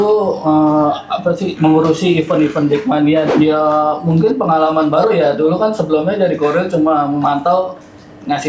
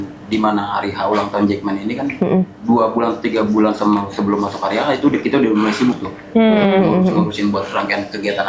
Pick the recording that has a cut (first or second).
first